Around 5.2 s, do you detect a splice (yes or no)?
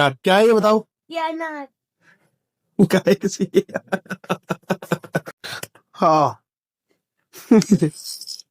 yes